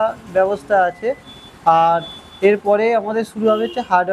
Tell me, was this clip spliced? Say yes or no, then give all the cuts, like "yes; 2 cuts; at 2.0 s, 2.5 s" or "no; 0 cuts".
no; 0 cuts